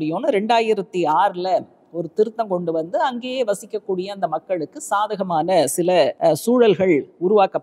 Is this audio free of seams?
no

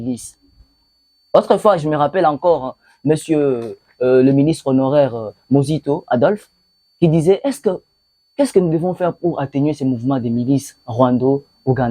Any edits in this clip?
no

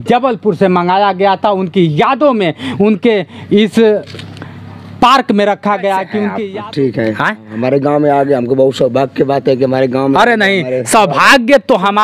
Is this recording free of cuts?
no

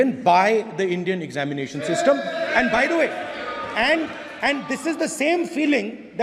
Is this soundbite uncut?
yes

